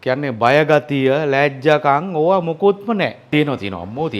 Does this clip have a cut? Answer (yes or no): yes